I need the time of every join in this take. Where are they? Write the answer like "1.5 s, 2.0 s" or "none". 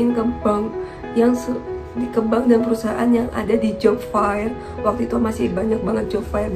none